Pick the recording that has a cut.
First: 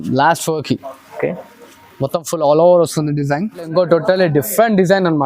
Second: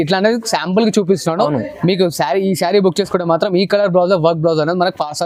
first; 1 cut; at 3.7 s

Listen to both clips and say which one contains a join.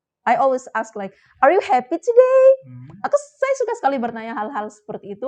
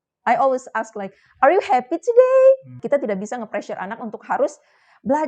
second; 1 cut; at 2.7 s

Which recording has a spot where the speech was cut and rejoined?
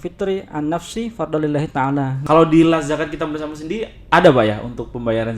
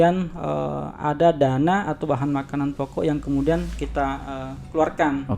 first; 1 cut; at 2.2 s

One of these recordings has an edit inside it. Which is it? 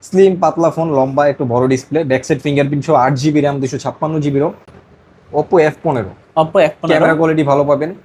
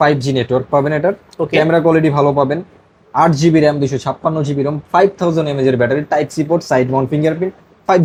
first; 1 cut; at 4.7 s

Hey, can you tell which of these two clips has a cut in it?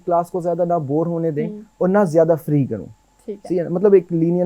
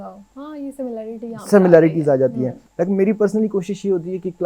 second; 1 cut; at 2.6 s

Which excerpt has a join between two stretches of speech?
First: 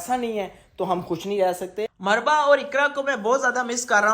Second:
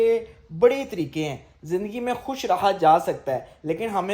first; 1 cut; at 1.8 s

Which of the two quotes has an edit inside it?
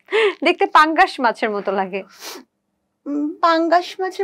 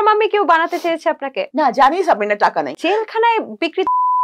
second; 2 cuts; at 1.4 s, 2.7 s

